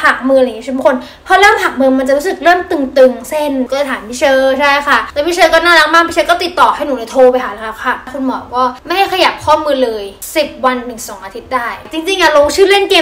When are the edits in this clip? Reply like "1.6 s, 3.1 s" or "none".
3.7 s, 8.1 s, 11.9 s